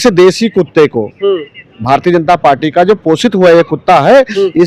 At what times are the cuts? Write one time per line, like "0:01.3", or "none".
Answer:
none